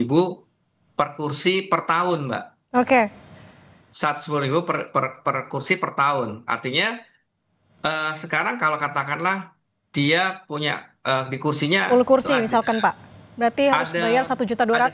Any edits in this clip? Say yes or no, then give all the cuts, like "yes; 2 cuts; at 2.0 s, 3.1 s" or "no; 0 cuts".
no; 0 cuts